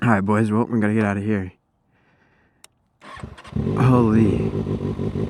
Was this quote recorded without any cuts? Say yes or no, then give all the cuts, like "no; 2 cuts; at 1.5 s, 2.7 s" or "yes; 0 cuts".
yes; 0 cuts